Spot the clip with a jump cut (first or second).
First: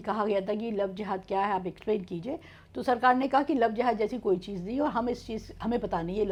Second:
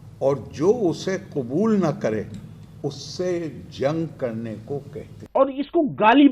second